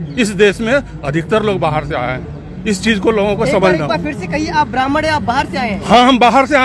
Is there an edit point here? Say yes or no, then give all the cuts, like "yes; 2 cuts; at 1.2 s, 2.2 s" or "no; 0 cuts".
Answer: no; 0 cuts